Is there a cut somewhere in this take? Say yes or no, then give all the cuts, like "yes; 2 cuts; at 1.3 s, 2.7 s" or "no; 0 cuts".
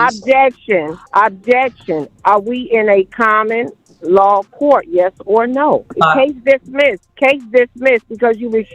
yes; 3 cuts; at 1.0 s, 5.9 s, 7.1 s